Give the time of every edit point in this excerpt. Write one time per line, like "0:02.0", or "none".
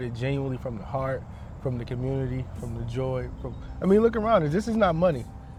none